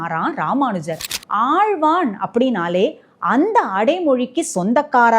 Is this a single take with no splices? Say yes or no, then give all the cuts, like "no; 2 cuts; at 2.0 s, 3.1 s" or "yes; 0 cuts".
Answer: no; 1 cut; at 1.1 s